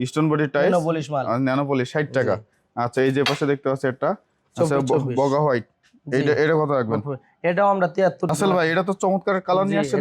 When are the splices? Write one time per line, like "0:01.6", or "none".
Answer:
0:08.3